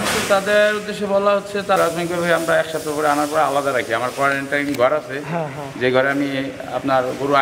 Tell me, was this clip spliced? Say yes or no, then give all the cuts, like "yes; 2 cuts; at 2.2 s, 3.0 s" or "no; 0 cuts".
yes; 1 cut; at 1.8 s